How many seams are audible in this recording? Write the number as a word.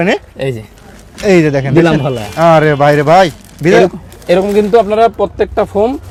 zero